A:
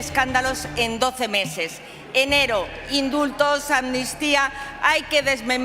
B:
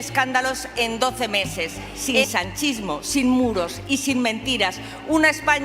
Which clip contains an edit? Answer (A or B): B